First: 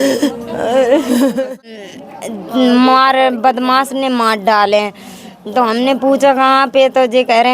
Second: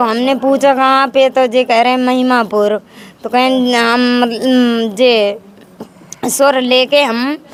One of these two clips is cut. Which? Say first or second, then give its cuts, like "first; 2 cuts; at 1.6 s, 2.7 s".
first; 1 cut; at 1.7 s